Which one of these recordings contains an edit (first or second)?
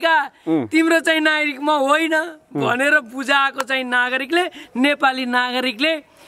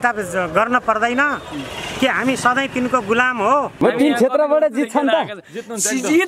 second